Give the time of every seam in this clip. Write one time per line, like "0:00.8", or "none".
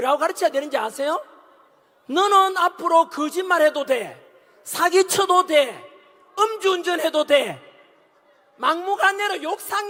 none